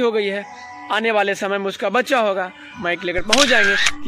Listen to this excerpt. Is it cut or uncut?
cut